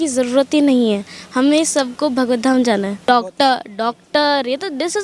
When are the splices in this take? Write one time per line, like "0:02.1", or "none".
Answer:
0:03.0